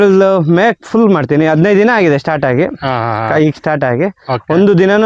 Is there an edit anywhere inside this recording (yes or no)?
no